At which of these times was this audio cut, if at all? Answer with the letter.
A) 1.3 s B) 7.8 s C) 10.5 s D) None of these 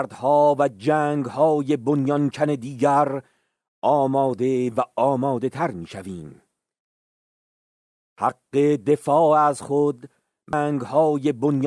C